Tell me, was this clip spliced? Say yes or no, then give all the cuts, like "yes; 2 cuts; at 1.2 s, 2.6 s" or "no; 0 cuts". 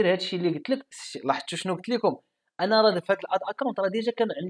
yes; 1 cut; at 1.0 s